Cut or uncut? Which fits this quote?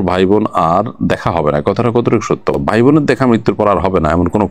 uncut